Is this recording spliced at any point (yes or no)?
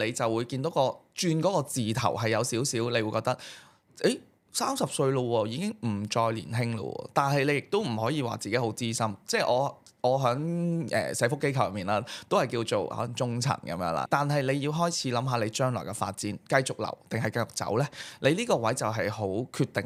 no